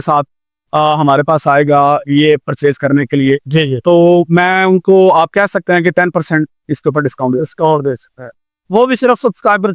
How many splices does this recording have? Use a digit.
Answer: 0